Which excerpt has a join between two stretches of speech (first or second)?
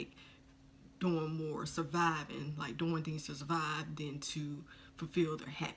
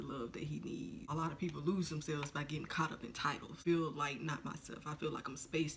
second